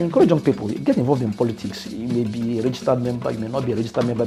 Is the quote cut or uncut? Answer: uncut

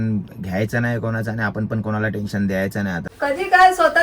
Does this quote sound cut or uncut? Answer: cut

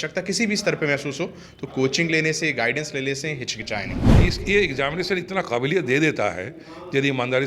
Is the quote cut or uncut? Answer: cut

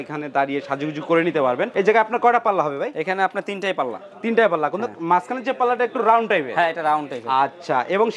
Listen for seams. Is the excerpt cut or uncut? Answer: uncut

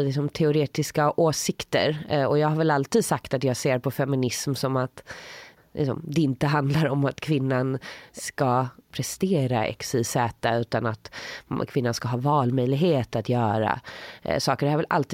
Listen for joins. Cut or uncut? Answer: cut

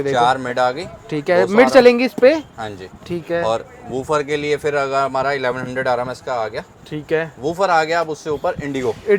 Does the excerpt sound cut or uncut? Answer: uncut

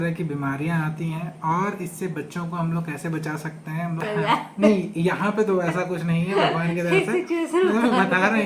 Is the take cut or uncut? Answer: cut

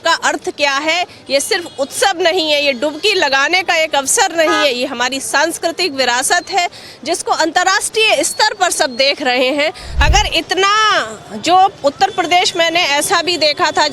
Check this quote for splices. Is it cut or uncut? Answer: cut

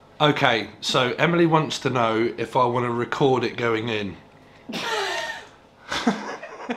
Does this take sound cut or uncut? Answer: cut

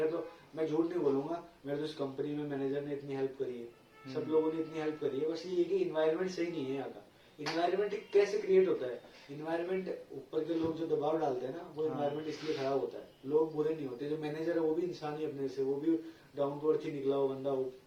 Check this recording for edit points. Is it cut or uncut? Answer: uncut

